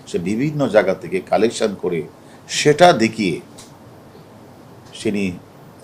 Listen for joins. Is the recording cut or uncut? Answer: uncut